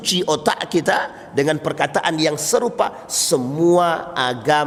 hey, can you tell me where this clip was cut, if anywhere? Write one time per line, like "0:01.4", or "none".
none